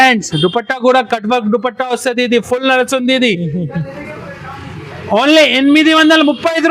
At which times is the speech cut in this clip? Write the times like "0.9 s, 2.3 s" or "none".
none